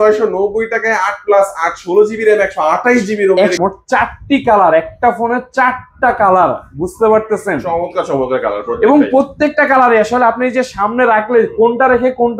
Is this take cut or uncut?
cut